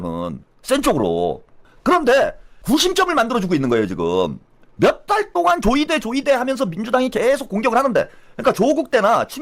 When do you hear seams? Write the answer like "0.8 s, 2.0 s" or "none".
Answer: 1.5 s, 2.5 s